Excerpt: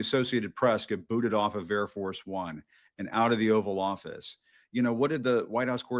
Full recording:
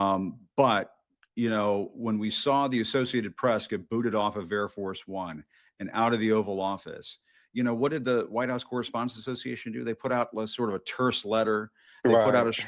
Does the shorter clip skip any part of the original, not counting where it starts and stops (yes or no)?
no